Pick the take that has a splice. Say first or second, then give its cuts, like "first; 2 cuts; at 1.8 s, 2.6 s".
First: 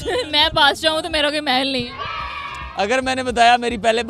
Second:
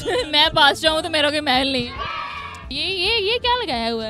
second; 1 cut; at 2.6 s